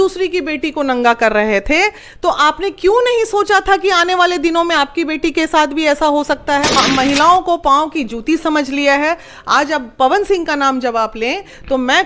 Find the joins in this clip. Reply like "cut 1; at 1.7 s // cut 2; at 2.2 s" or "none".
cut 1; at 6.8 s